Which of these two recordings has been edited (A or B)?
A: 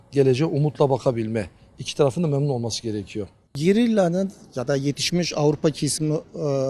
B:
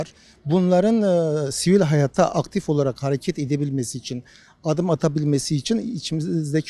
A